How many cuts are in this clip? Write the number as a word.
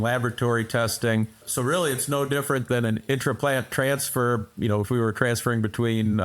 one